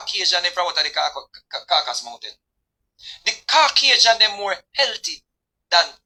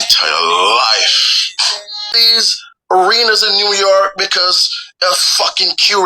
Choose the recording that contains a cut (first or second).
second